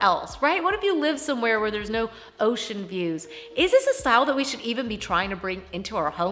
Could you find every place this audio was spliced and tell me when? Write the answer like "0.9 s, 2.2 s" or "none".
none

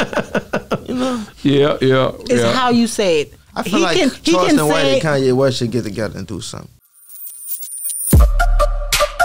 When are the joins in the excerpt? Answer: 6.8 s

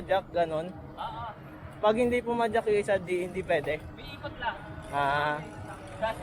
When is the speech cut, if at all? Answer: none

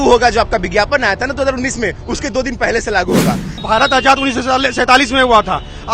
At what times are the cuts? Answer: 3.5 s

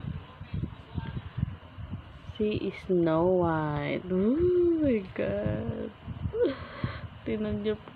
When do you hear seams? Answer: none

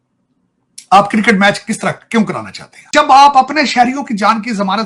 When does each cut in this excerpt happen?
2.9 s

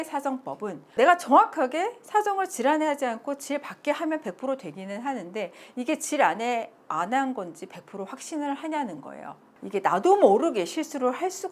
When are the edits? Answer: 0.9 s

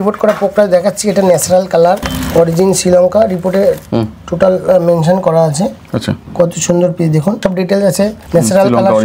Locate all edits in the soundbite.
2.1 s, 6.2 s, 7.6 s

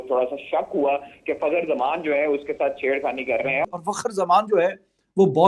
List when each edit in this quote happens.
3.6 s

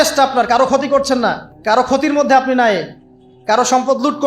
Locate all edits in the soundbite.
1.5 s

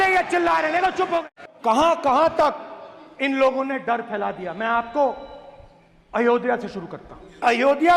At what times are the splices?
1.4 s

